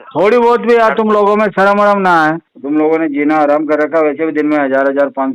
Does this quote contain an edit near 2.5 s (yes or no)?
yes